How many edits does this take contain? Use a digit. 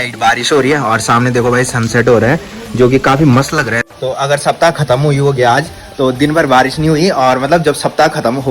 1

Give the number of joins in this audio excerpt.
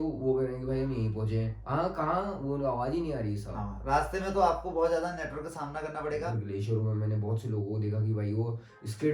1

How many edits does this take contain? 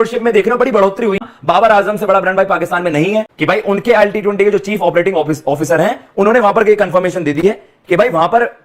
2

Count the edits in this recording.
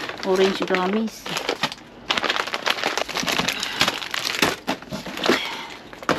2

